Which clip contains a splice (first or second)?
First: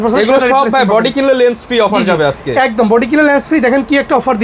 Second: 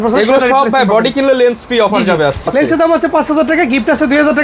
second